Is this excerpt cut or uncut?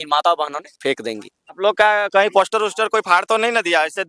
cut